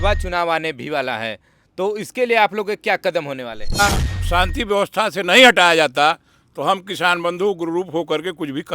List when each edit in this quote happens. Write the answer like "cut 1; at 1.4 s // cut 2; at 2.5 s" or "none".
cut 1; at 3.8 s